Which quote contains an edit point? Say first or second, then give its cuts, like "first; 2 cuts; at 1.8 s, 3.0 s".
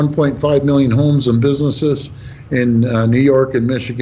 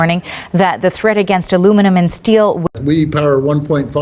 second; 1 cut; at 2.6 s